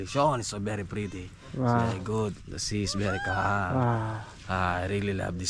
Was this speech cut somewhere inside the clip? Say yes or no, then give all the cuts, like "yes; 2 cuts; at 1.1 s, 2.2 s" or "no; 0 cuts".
no; 0 cuts